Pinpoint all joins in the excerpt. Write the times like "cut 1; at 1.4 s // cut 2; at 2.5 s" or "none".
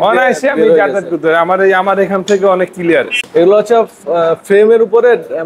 cut 1; at 3.2 s